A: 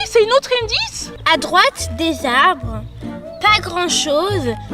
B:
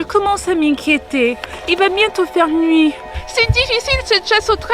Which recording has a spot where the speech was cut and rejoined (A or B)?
A